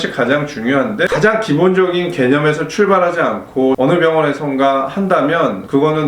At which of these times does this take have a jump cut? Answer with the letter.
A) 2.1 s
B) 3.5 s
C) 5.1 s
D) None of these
D